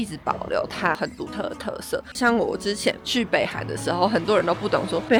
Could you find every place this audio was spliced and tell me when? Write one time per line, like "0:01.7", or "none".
none